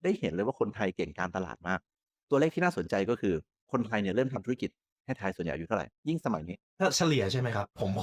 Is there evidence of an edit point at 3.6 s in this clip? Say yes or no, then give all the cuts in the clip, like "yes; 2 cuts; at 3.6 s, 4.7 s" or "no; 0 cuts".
no; 1 cut; at 2.0 s